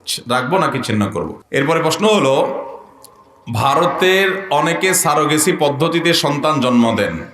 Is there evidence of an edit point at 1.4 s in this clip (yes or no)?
yes